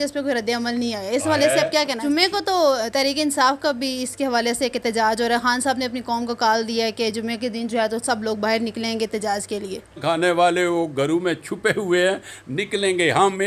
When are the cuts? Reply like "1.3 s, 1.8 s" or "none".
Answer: 2.0 s, 10.0 s